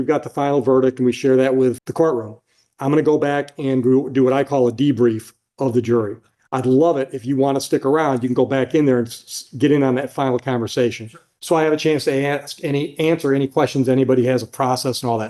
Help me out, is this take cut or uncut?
cut